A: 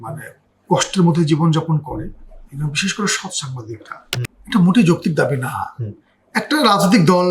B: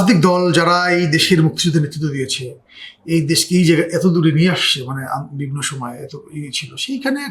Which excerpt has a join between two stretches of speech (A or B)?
A